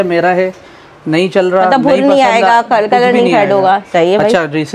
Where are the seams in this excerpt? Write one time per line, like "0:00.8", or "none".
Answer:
none